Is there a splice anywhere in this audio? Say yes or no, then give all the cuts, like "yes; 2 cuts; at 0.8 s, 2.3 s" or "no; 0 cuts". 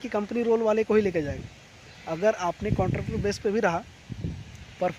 no; 0 cuts